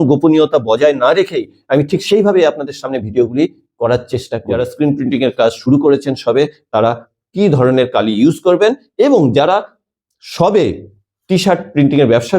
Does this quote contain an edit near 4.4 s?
yes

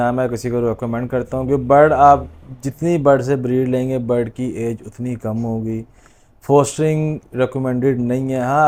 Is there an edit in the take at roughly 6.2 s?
no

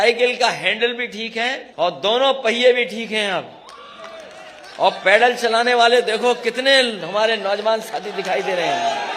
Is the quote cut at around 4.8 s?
no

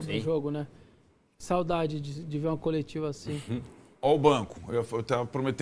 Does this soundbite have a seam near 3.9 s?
no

